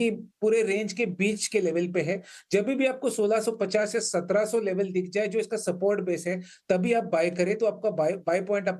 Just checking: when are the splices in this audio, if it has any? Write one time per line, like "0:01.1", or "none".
0:06.2

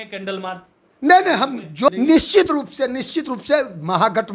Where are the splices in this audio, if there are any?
0:01.9

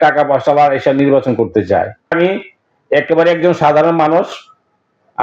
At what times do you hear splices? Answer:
0:02.1

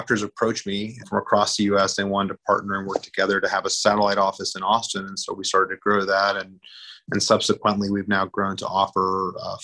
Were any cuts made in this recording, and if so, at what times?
0:01.0

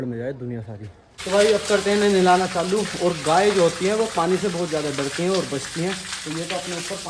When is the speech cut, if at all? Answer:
none

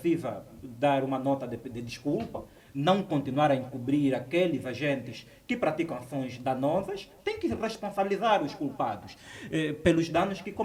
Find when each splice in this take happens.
none

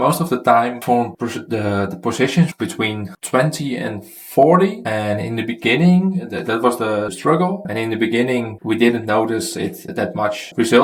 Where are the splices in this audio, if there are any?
none

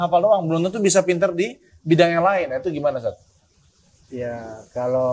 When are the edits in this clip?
none

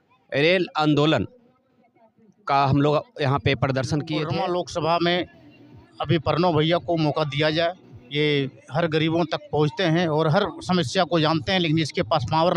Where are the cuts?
0:04.3

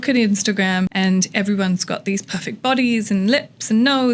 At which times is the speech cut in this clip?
0:00.9

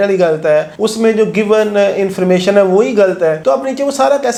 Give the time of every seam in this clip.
none

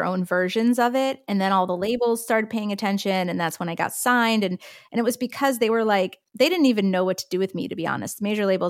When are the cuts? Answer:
none

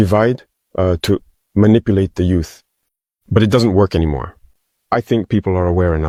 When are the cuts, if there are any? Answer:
none

